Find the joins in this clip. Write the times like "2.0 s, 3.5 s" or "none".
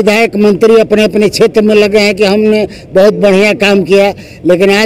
none